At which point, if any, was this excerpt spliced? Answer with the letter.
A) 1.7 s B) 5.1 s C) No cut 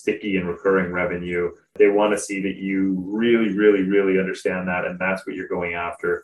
A